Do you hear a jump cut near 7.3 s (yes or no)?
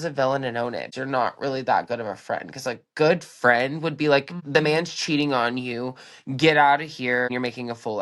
yes